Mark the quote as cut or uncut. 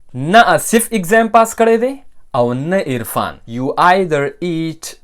cut